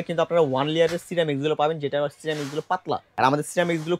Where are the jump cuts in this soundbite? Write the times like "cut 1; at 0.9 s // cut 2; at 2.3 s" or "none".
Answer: cut 1; at 3.1 s